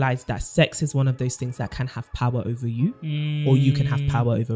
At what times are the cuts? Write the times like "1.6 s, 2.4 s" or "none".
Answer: none